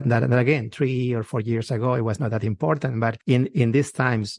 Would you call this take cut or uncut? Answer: cut